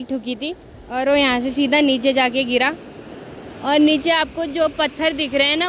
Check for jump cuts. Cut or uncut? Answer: uncut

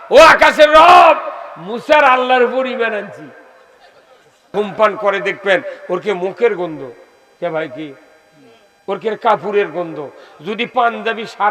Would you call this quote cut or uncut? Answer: cut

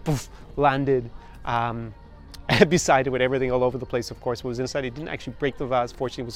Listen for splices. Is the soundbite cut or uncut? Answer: uncut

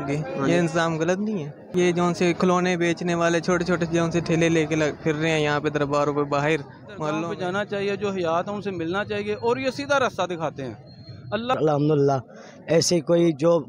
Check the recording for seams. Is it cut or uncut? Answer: cut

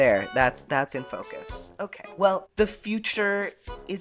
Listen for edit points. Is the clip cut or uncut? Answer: cut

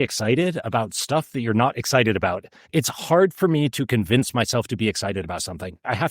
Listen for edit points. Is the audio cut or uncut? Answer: cut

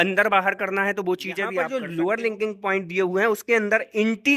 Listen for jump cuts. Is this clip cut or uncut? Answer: cut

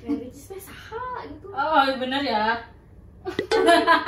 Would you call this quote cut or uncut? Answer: uncut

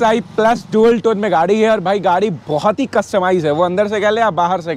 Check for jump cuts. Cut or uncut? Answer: uncut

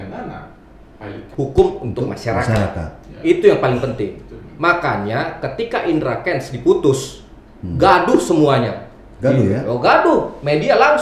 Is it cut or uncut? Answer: cut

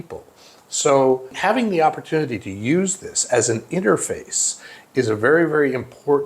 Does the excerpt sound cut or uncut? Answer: cut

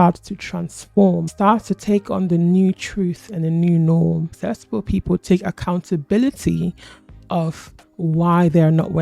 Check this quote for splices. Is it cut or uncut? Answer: cut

